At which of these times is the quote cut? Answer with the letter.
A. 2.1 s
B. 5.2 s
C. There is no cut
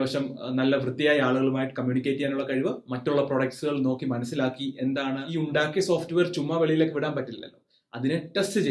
B